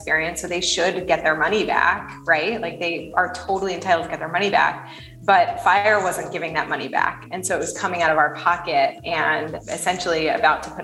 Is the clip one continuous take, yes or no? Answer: no